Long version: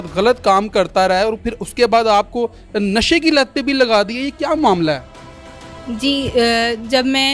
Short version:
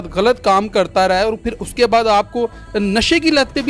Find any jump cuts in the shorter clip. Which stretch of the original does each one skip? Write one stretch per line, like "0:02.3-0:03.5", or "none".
none